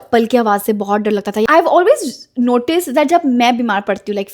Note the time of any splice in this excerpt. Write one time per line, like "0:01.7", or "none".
0:01.5